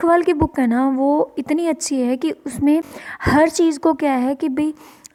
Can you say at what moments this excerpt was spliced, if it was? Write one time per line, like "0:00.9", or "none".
none